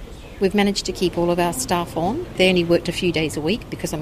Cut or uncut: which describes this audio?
cut